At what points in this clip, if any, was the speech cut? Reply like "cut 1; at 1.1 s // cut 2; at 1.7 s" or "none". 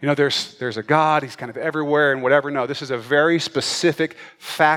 none